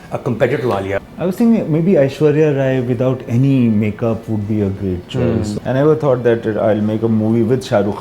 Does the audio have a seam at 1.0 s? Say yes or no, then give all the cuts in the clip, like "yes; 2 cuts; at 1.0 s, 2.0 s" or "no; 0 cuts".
yes; 2 cuts; at 1.0 s, 5.5 s